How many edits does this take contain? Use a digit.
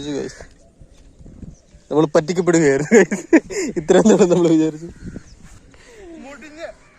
1